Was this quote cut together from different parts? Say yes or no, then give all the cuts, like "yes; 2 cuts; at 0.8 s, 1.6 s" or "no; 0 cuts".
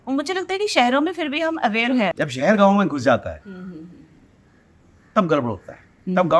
yes; 1 cut; at 2.1 s